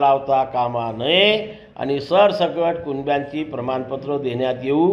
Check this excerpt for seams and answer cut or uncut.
uncut